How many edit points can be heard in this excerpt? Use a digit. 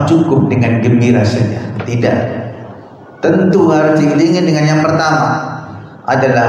0